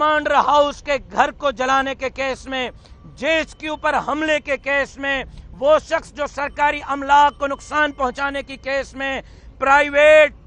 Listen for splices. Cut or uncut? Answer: uncut